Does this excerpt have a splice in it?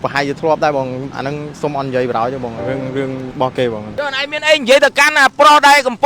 yes; 1 cut; at 3.9 s

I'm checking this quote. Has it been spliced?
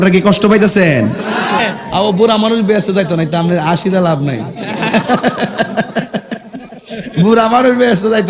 yes; 1 cut; at 1.6 s

